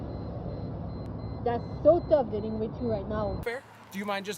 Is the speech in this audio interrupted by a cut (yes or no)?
yes